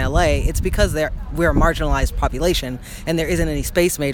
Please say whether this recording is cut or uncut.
uncut